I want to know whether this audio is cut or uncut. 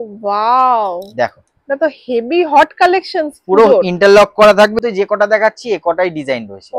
cut